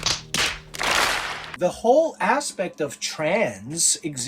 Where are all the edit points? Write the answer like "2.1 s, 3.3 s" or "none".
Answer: 1.4 s